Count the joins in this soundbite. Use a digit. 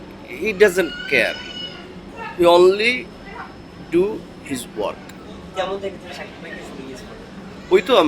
0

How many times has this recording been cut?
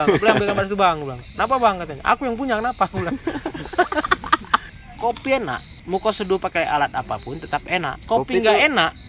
3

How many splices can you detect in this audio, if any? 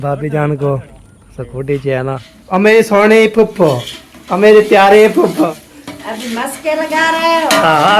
2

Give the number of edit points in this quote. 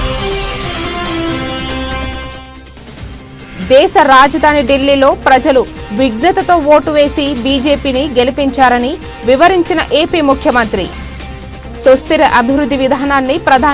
1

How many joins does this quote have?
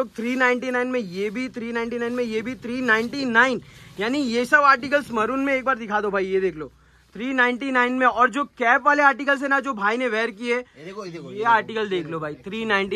0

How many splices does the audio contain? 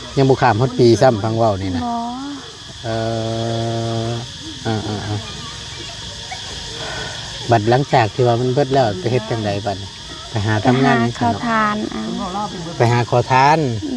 0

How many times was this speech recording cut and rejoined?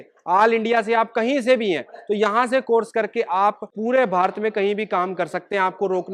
0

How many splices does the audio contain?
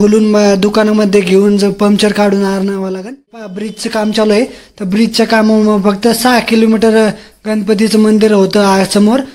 1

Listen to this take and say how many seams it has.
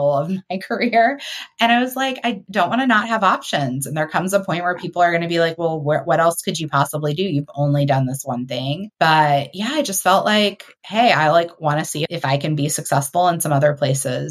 2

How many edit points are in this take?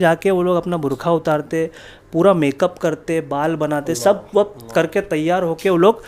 0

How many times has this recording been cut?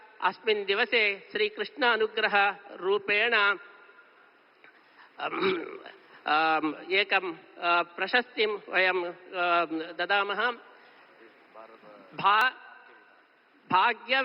1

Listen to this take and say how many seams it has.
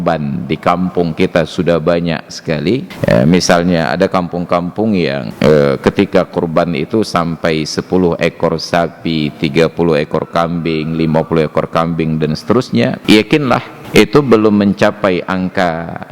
4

